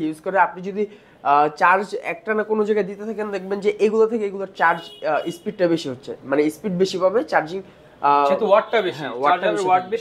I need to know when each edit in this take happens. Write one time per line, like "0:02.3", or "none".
none